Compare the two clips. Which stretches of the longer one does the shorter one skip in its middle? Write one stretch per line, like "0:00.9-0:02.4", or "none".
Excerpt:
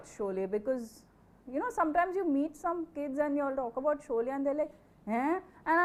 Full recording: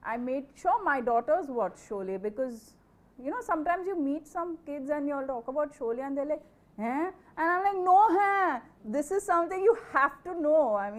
none